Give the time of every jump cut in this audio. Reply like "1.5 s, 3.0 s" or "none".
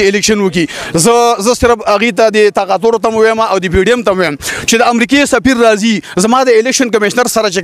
none